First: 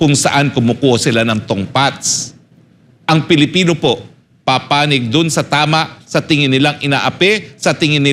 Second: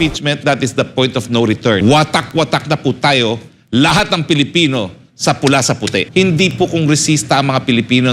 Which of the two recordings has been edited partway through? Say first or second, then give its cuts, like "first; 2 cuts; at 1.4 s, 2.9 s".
second; 2 cuts; at 1.8 s, 6.1 s